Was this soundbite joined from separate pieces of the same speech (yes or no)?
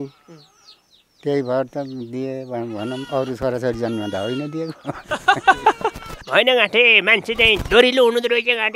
yes